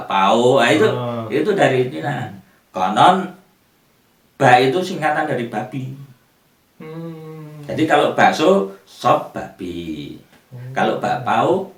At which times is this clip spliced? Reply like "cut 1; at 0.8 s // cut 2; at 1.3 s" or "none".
none